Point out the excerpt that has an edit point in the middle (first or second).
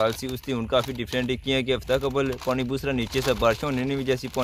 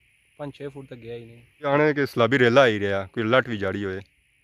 second